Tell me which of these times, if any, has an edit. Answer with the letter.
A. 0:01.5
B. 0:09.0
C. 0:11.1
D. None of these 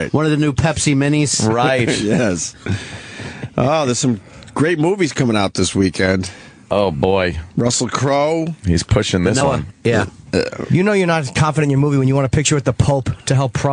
A